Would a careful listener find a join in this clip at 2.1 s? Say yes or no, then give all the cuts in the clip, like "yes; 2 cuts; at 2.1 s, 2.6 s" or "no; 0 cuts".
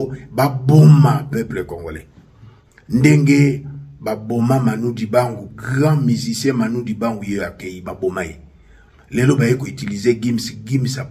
no; 1 cut; at 5.5 s